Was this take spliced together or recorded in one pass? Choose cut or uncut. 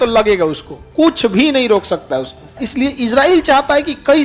cut